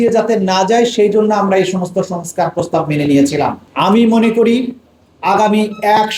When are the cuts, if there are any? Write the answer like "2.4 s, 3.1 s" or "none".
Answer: 3.6 s